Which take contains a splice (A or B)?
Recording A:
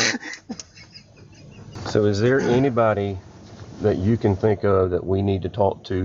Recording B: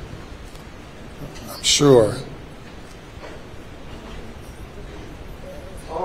A